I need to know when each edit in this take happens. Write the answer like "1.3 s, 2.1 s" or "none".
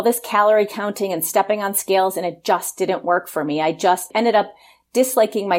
4.1 s